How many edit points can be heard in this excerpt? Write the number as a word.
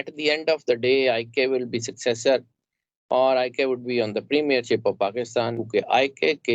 one